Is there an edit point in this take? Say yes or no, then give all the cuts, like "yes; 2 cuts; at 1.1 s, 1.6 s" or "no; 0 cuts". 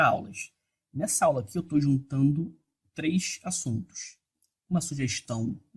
yes; 1 cut; at 2.1 s